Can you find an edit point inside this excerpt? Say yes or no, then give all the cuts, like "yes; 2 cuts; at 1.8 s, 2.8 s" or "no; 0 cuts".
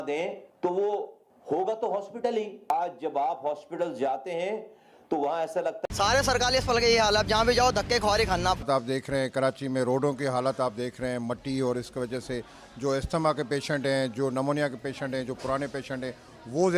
yes; 2 cuts; at 5.8 s, 8.6 s